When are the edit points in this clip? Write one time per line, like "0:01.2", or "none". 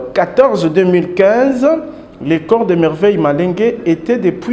none